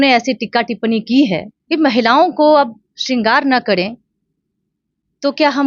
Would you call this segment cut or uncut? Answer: cut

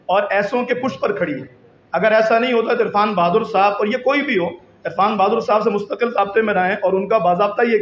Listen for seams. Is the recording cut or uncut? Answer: uncut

